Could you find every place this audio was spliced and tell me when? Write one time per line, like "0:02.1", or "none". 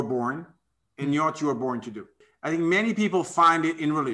0:02.2